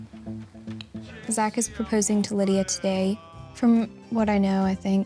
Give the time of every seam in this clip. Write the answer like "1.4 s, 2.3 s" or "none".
1.1 s